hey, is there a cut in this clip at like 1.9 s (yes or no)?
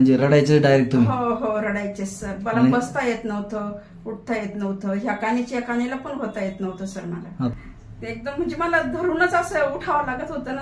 no